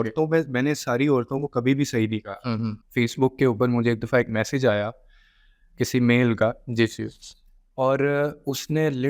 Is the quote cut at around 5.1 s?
no; 1 cut; at 2.8 s

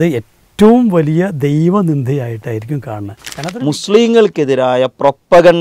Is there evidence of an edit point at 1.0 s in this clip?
no; 1 cut; at 3.3 s

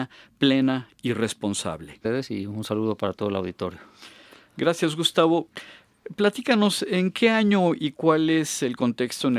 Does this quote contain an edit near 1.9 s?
no; 0 cuts

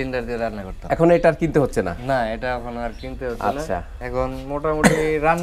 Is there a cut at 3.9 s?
yes; 1 cut; at 3.9 s

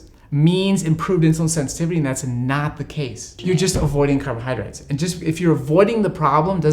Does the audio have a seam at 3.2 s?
yes; 1 cut; at 3.2 s

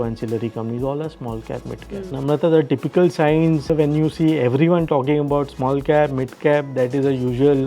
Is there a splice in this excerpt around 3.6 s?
yes; 2 cuts; at 2.1 s, 3.6 s

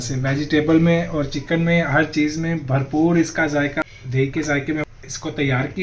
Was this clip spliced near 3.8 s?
yes; 2 cuts; at 3.8 s, 4.9 s

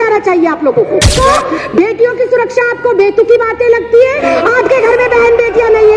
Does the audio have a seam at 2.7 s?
no; 2 cuts; at 1.1 s, 4.2 s

